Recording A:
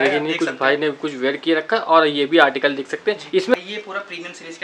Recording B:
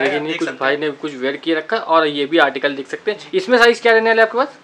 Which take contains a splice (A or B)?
A